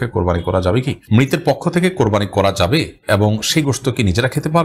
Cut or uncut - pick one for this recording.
cut